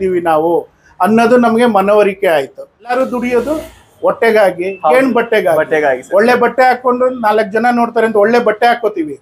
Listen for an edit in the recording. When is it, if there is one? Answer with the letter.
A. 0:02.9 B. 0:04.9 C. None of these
A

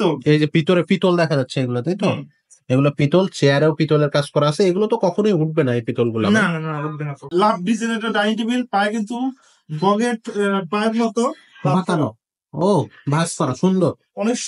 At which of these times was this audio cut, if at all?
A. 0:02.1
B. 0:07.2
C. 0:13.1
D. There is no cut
B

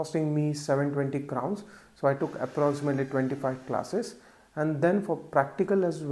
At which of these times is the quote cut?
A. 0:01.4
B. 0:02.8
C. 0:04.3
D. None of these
D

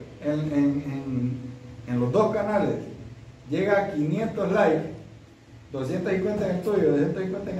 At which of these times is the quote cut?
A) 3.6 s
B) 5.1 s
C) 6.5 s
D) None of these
D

